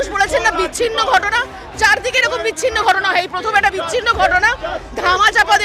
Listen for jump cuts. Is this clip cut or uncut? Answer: uncut